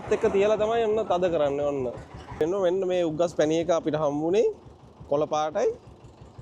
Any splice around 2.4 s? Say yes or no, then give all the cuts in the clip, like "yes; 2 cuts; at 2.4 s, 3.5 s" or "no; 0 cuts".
yes; 1 cut; at 2.4 s